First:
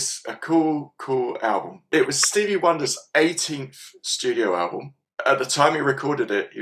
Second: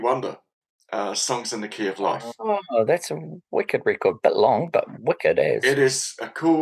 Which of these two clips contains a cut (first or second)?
first